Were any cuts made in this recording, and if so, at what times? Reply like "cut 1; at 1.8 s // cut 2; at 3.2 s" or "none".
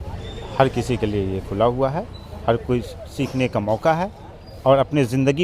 none